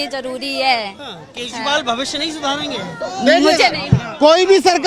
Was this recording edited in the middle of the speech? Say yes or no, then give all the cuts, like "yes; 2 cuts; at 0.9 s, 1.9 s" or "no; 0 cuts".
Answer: no; 0 cuts